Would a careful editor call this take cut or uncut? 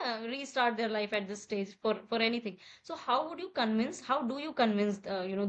uncut